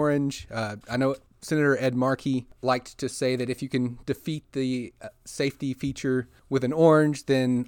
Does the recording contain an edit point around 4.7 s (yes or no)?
no